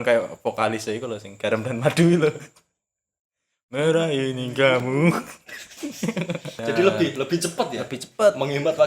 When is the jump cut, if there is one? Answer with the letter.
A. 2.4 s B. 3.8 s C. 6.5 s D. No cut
C